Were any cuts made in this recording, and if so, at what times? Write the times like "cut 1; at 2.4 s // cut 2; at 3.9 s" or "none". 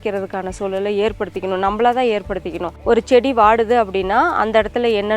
cut 1; at 2.7 s